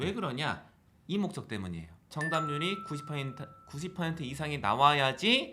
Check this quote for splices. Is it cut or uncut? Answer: cut